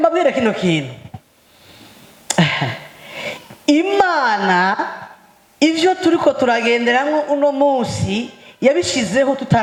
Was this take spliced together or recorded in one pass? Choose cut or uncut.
uncut